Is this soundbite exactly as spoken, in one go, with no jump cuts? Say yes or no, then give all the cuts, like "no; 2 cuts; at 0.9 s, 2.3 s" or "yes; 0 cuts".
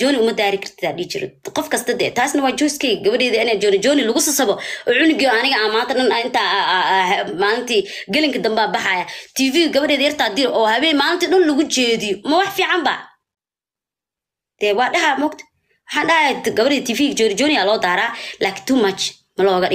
yes; 0 cuts